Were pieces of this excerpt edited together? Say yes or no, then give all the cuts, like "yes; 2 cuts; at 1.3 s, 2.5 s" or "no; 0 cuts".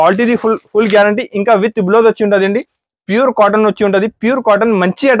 no; 0 cuts